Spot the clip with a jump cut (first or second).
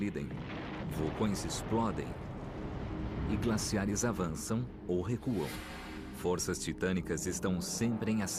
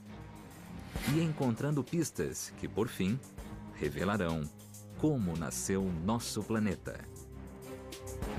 second